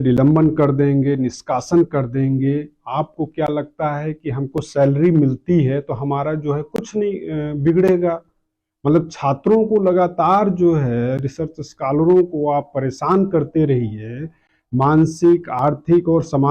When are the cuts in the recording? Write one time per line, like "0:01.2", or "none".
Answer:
none